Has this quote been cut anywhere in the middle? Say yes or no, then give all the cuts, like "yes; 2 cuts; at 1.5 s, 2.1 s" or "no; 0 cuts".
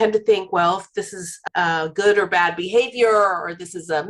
no; 0 cuts